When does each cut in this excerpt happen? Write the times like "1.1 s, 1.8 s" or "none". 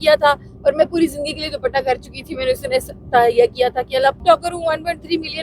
4.2 s